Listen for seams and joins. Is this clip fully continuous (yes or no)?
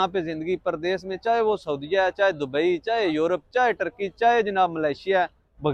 yes